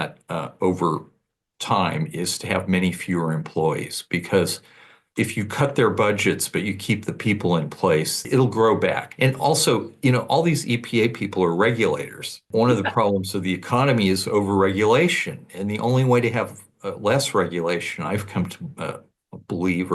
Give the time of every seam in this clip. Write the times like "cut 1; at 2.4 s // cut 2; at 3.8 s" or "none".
cut 1; at 5.0 s // cut 2; at 8.2 s // cut 3; at 9.1 s // cut 4; at 12.4 s